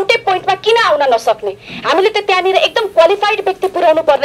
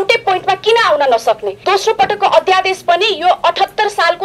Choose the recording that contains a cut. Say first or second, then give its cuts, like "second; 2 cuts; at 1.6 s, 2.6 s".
second; 1 cut; at 1.5 s